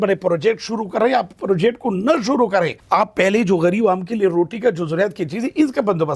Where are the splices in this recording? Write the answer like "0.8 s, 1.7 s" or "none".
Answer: 2.8 s

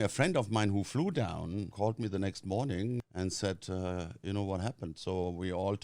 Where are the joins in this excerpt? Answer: 1.7 s, 3.0 s

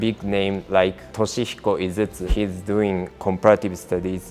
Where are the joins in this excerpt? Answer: 1.0 s, 2.3 s

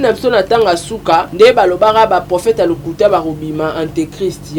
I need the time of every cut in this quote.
1.3 s

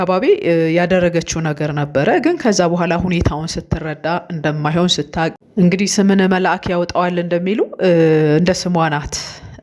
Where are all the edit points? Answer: 5.5 s

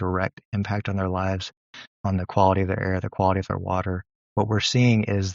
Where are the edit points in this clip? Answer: 4.1 s

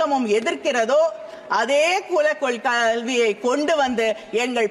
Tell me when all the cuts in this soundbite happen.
none

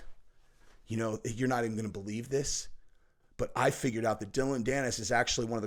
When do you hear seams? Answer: none

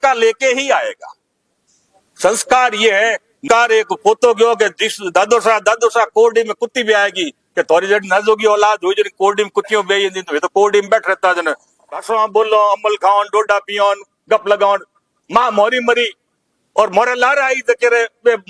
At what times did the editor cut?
3.4 s, 12.1 s

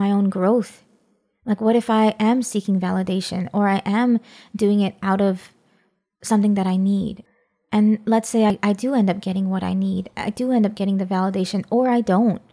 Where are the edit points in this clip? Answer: 7.2 s, 8.5 s

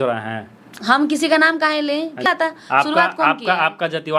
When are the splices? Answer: 2.3 s

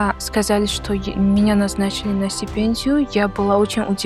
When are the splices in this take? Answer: none

